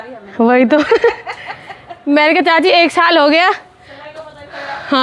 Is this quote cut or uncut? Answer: uncut